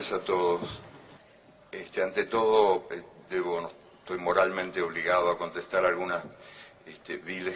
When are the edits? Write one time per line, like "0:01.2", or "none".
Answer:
0:03.5